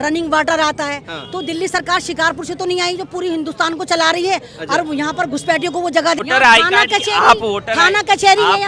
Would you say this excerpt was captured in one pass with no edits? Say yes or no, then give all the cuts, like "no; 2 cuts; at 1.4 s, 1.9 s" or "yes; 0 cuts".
no; 1 cut; at 6.2 s